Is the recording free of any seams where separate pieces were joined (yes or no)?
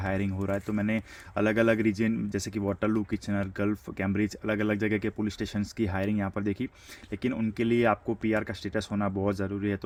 yes